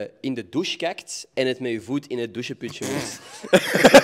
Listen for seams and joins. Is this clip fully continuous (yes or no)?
yes